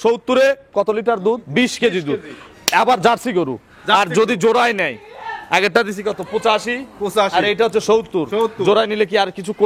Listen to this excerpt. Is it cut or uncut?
uncut